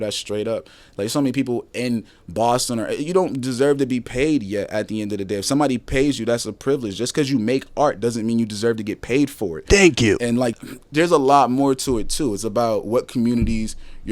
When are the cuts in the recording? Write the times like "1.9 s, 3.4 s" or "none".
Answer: 10.5 s